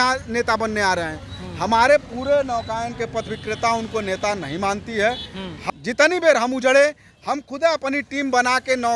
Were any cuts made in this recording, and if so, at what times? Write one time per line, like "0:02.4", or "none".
0:05.7

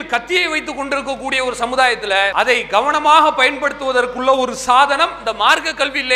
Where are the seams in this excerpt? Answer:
0:02.3

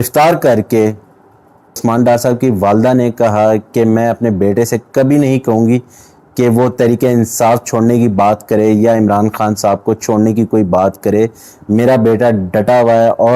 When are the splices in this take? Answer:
0:01.8

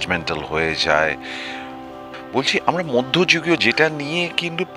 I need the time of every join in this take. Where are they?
0:02.1

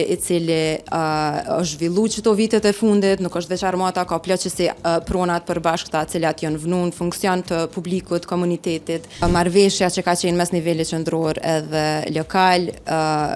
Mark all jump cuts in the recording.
0:09.2

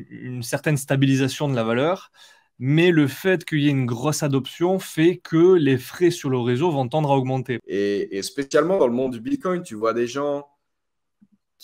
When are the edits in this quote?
0:07.6

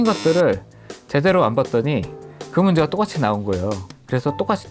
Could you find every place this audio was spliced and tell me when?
none

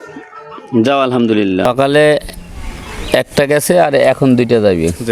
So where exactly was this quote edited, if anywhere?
0:01.6

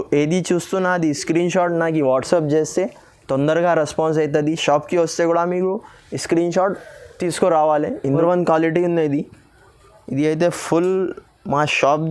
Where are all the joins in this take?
0:08.2

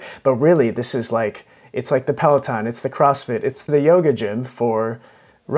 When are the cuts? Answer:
0:03.6

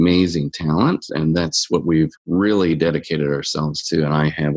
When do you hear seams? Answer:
0:01.1
0:02.2

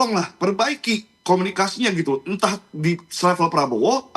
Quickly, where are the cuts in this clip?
none

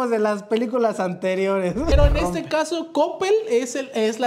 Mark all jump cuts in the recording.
0:01.9

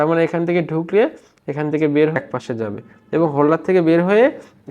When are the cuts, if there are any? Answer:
0:02.2

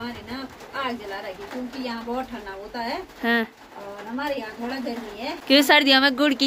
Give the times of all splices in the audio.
0:05.3

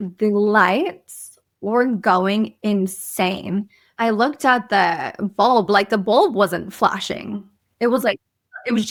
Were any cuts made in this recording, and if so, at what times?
none

